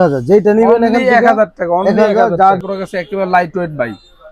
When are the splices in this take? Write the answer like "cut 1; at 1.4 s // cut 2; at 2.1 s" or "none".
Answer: cut 1; at 2.6 s